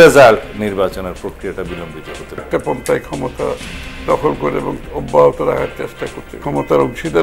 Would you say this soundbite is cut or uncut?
cut